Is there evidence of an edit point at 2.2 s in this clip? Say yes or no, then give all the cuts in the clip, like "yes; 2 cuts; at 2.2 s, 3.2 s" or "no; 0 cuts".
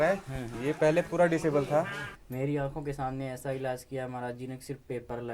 yes; 1 cut; at 2.2 s